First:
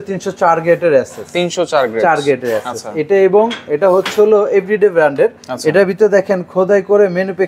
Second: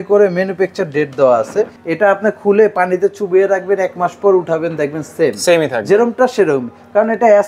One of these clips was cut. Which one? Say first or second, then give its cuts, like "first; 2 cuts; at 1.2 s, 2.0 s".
second; 1 cut; at 1.7 s